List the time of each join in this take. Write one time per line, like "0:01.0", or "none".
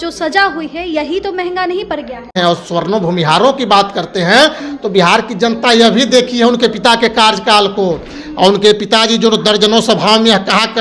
0:02.4